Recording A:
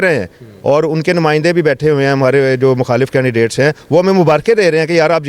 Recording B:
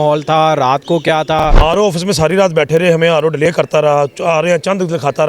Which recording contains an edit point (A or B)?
B